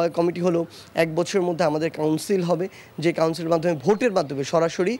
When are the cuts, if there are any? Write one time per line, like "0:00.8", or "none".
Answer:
none